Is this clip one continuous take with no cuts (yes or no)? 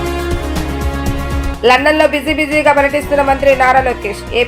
yes